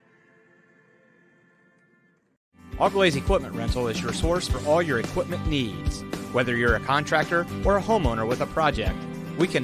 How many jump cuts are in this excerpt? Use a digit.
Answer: 1